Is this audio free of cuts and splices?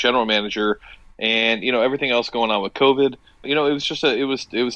no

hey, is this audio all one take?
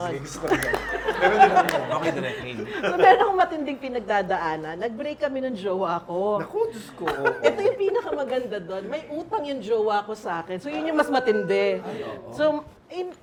yes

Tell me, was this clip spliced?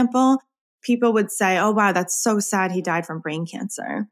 no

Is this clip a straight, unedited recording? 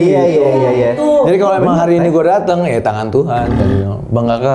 no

